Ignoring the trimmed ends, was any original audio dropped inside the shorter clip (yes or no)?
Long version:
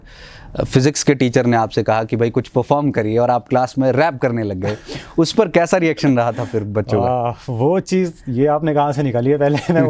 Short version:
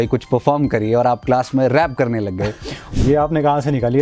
yes